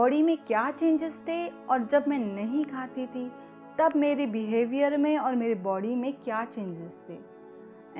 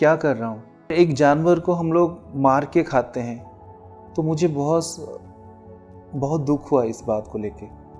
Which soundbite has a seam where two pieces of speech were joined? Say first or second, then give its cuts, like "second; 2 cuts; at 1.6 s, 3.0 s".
second; 1 cut; at 0.9 s